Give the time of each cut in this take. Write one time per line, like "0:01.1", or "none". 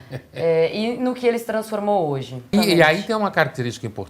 0:02.5